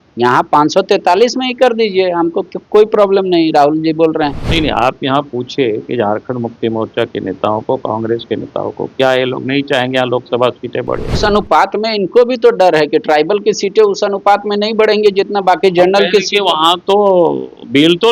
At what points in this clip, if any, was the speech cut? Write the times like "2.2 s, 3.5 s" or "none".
4.4 s, 11.1 s